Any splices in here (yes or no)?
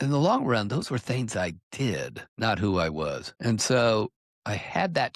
yes